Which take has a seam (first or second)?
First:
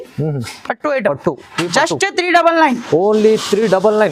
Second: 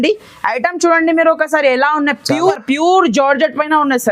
second